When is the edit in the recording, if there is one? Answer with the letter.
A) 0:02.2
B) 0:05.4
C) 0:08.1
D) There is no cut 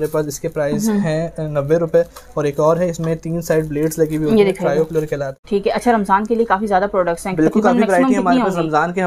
B